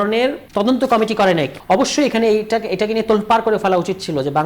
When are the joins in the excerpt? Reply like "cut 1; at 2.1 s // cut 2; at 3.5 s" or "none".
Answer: cut 1; at 1.6 s